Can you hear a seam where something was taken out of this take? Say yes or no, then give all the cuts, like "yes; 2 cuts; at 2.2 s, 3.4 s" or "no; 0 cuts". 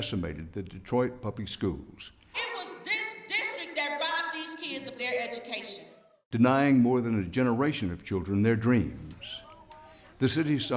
yes; 1 cut; at 6.5 s